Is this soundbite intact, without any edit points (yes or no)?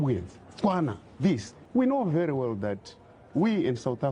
no